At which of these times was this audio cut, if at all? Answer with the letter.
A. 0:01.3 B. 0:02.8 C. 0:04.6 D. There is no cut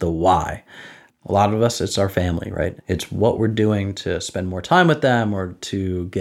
B